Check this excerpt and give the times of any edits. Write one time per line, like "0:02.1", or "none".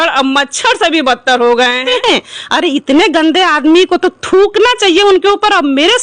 0:01.9